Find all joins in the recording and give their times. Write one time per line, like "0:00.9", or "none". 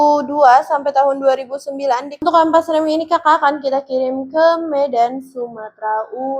0:02.2